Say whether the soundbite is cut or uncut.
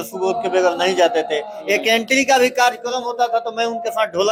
uncut